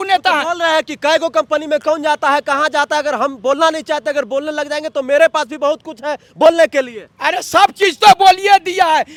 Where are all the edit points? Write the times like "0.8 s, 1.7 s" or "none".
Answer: none